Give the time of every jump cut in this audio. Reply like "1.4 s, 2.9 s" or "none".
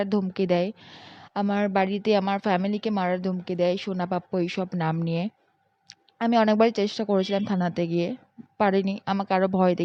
none